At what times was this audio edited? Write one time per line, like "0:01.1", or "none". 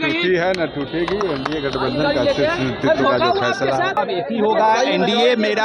0:03.9